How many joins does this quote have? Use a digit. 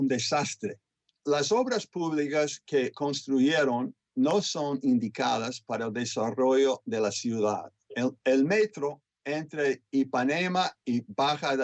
1